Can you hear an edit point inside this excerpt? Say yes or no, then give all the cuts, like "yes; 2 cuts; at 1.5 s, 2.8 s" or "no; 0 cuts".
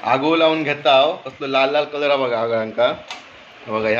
no; 0 cuts